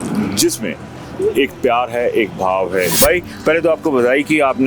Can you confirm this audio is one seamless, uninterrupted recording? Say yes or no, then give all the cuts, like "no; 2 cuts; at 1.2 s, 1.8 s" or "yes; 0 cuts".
no; 1 cut; at 2.9 s